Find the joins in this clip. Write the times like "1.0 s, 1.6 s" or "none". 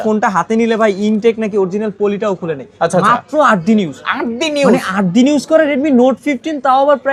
none